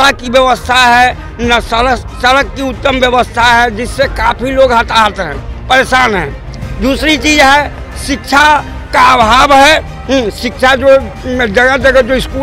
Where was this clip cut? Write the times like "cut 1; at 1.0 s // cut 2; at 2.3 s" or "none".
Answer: none

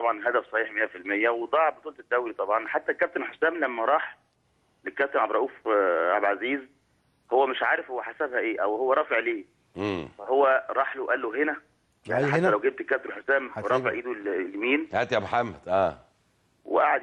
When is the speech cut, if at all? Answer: none

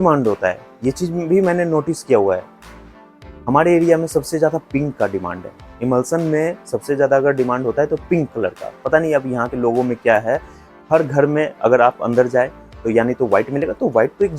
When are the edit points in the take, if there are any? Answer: none

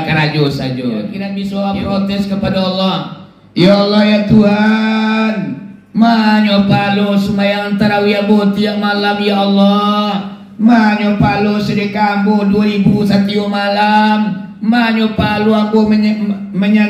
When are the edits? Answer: cut 1; at 1.2 s

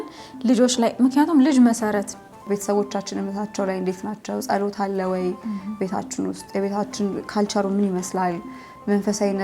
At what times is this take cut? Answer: cut 1; at 2.4 s

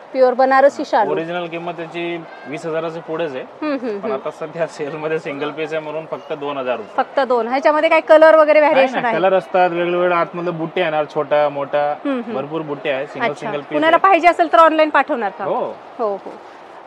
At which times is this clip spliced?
none

